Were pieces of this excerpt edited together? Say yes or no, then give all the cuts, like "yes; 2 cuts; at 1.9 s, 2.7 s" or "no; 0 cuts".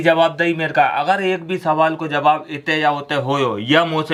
no; 0 cuts